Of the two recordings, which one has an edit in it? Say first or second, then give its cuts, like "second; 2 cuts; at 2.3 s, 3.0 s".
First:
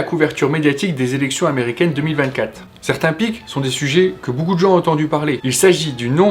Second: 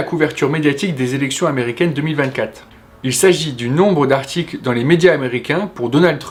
first; 2 cuts; at 2.7 s, 5.4 s